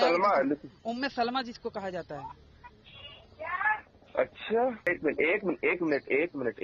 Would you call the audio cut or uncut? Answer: cut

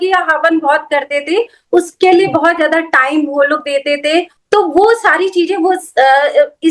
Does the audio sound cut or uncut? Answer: uncut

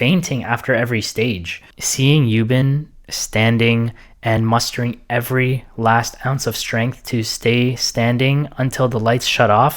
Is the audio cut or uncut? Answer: cut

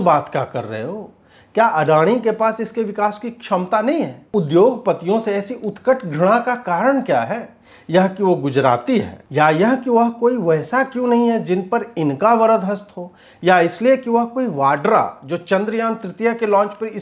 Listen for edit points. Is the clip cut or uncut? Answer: cut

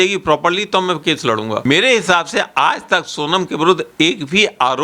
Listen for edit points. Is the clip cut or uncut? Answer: cut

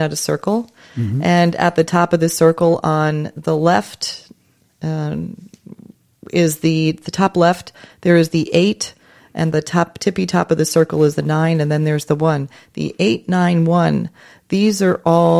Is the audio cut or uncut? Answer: uncut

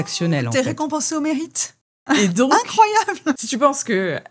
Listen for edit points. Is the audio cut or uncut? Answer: uncut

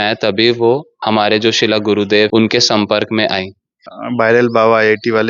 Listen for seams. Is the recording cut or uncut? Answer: cut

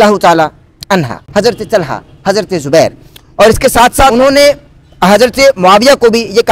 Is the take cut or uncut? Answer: cut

